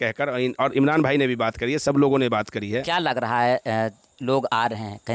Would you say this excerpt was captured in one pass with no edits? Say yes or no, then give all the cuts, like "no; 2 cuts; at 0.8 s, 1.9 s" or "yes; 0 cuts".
no; 1 cut; at 2.8 s